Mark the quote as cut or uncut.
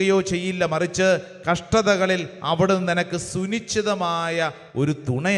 uncut